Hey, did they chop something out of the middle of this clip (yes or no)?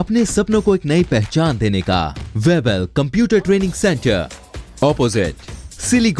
yes